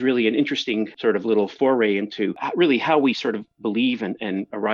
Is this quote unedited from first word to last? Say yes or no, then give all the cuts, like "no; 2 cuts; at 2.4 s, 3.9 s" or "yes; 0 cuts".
no; 2 cuts; at 0.9 s, 2.4 s